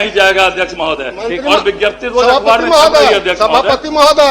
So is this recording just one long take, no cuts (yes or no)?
yes